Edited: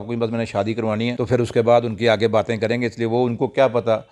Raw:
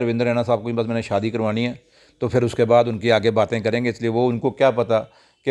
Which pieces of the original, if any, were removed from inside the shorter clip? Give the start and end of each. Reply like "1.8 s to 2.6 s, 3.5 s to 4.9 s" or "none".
1.7 s to 2.2 s